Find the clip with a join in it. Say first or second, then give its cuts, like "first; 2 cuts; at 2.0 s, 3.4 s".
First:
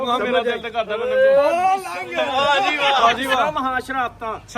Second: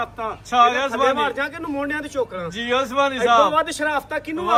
first; 1 cut; at 3.0 s